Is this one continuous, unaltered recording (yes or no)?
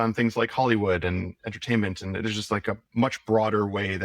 no